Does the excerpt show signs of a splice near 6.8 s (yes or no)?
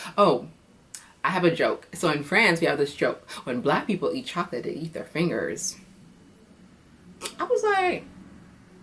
no